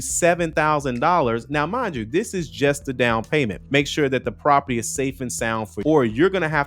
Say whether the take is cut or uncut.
cut